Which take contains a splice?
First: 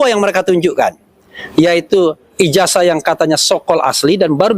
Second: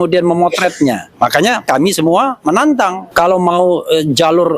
second; 2 cuts; at 1.6 s, 3.0 s

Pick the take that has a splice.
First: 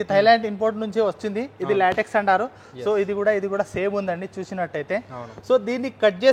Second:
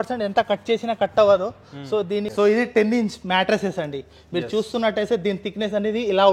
second; 1 cut; at 2.3 s

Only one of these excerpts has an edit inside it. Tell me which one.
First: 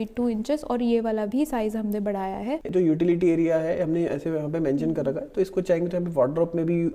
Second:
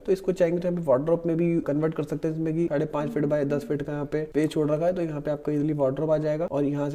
first; 1 cut; at 2.7 s

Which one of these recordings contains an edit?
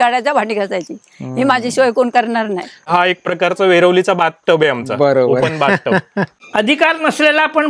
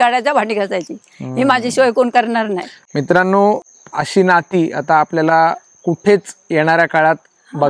first; 2 cuts; at 2.9 s, 6.4 s

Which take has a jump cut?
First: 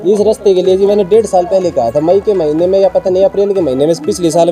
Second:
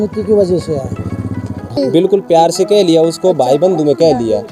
second; 1 cut; at 1.6 s

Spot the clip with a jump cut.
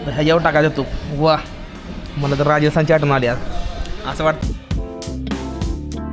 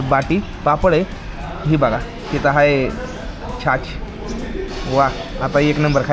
first; 1 cut; at 4.4 s

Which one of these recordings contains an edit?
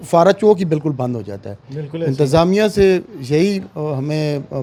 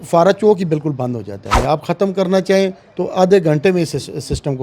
second; 1 cut; at 1.5 s

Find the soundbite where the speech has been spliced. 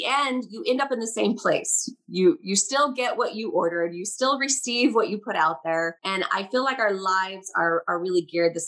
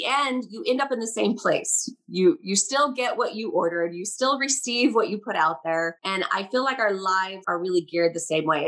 second; 1 cut; at 7.5 s

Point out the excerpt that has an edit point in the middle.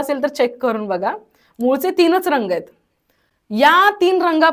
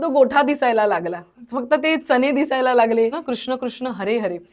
second; 1 cut; at 3.3 s

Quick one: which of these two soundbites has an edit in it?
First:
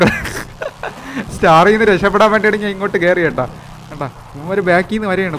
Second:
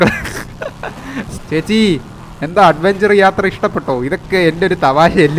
second; 1 cut; at 1.3 s

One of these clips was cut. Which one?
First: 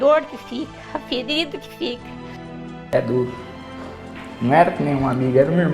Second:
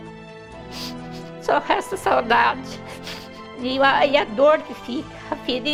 first; 1 cut; at 2.5 s

